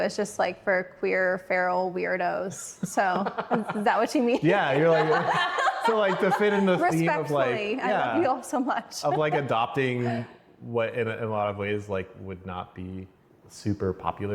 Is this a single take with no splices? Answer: yes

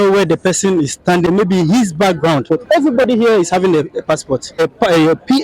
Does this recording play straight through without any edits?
no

